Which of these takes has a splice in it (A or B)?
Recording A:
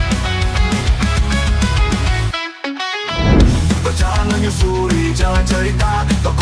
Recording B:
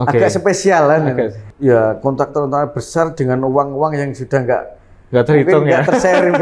B